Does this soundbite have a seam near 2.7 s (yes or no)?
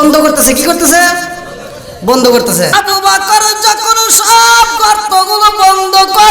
yes